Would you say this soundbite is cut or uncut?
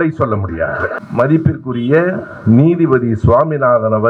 cut